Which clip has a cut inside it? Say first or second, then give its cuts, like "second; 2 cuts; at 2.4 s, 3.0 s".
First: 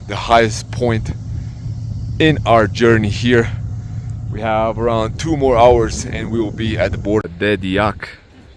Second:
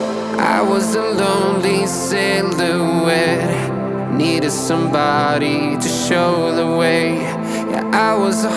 first; 1 cut; at 7.3 s